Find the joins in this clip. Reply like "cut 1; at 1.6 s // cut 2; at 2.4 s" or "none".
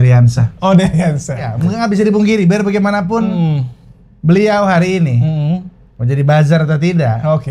cut 1; at 1.5 s